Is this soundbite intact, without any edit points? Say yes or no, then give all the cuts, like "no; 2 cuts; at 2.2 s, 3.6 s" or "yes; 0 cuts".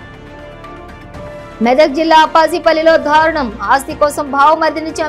yes; 0 cuts